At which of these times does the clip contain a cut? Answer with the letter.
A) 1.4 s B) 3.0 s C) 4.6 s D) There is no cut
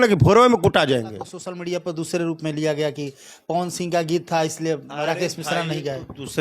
A